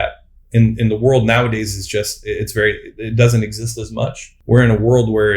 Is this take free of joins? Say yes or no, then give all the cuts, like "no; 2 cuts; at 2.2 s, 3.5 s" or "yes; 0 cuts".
no; 1 cut; at 4.3 s